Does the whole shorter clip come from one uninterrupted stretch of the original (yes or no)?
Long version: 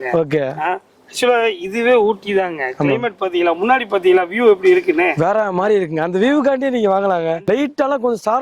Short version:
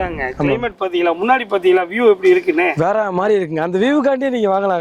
yes